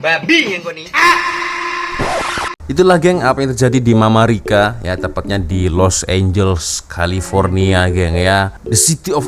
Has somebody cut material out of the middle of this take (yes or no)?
yes